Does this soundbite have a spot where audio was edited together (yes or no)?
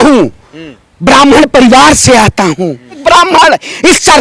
yes